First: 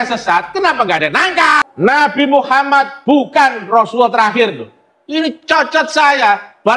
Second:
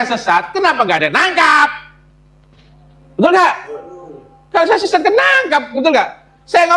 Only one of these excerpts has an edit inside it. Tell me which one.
first; 1 cut; at 1.6 s

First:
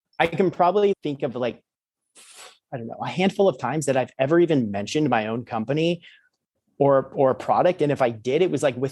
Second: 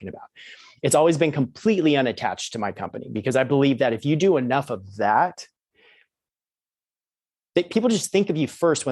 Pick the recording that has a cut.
first; 1 cut; at 1.0 s

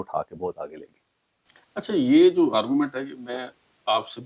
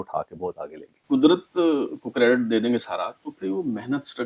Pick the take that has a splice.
second; 1 cut; at 0.9 s

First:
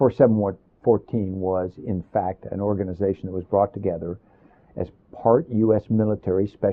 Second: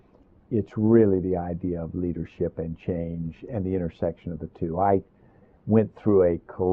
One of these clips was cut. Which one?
second; 1 cut; at 4.7 s

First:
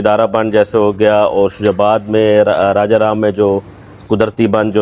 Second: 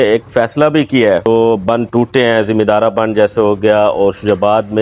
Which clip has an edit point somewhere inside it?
second; 1 cut; at 1.3 s

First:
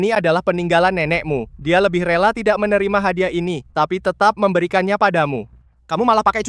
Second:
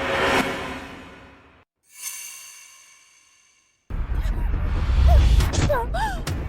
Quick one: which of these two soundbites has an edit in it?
second; 1 cut; at 3.9 s

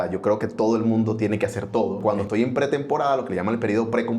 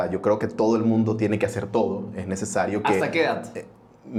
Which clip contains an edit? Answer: first; 1 cut; at 2.2 s

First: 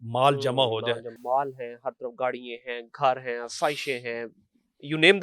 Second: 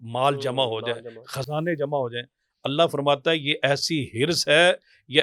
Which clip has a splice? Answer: first; 1 cut; at 1.2 s

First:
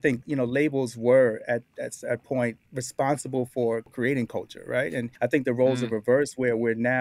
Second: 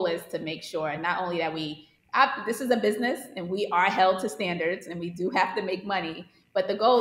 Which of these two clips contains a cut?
first; 3 cuts; at 2.6 s, 3.9 s, 5.1 s

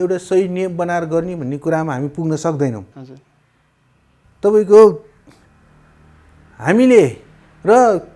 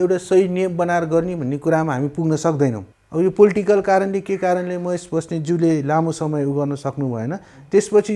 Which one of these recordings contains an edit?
second; 1 cut; at 2.9 s

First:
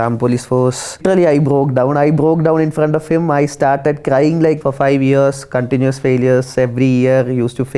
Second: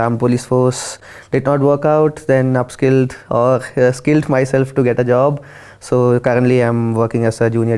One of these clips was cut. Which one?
first; 2 cuts; at 1.0 s, 4.6 s

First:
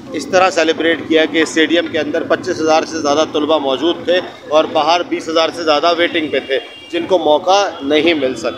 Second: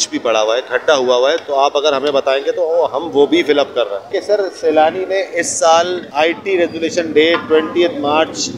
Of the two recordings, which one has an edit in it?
second; 2 cuts; at 4.1 s, 6.0 s

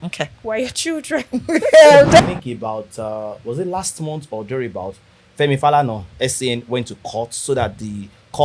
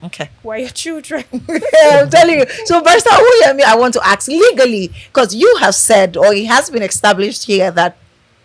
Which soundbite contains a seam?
first; 1 cut; at 2.2 s

